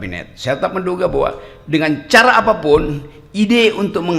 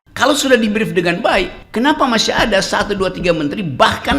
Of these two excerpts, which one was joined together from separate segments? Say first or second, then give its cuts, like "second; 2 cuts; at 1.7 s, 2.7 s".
second; 1 cut; at 1.6 s